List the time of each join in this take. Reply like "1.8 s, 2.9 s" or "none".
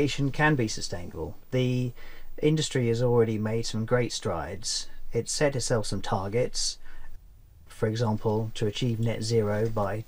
1.4 s